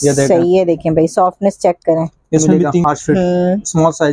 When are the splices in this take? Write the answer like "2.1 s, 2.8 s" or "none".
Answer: 2.8 s